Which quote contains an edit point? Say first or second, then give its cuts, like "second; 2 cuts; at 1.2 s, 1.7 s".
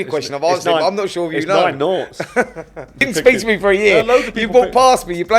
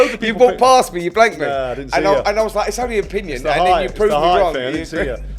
first; 1 cut; at 3.0 s